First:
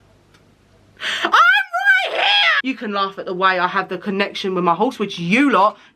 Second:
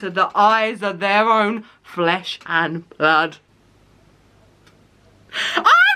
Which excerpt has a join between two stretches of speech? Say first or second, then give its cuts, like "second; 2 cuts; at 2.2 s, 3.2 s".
first; 1 cut; at 2.6 s